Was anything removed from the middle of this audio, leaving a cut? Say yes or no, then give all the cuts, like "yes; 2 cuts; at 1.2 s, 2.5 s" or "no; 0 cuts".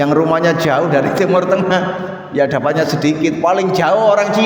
no; 0 cuts